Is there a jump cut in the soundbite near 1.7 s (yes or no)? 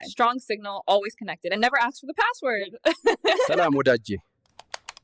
no